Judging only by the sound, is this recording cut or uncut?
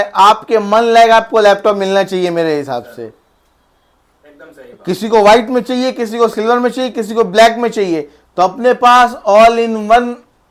uncut